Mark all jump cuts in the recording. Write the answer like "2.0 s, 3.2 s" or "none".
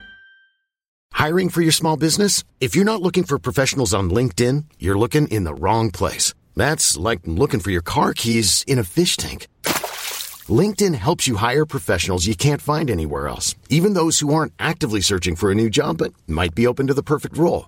1.0 s